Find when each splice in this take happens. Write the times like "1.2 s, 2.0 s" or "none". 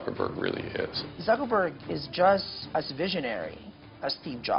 1.0 s, 2.6 s

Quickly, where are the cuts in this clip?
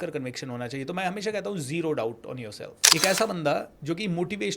2.7 s

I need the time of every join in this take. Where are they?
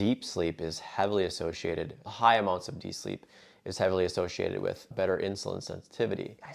none

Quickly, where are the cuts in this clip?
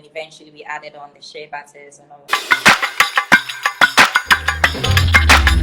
2.2 s

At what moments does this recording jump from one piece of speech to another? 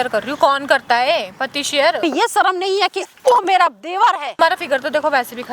2.0 s, 4.3 s

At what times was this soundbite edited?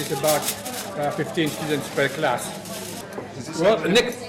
3.0 s

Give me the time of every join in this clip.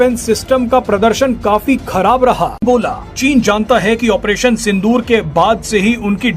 2.6 s

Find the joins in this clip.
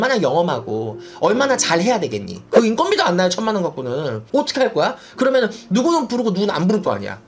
2.4 s

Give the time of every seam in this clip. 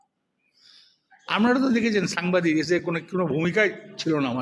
none

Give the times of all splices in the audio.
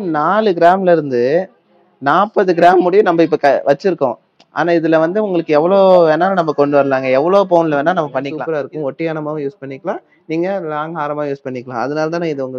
8.3 s

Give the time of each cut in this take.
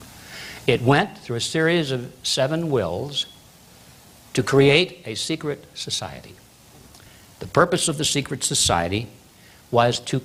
none

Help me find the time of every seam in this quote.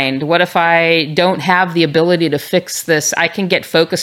none

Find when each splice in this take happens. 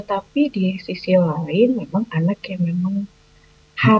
none

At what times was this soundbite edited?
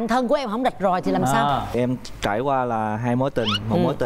1.8 s

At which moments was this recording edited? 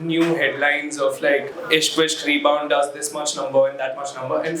1.5 s

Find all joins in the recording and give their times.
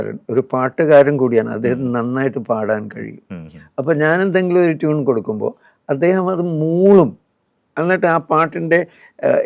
none

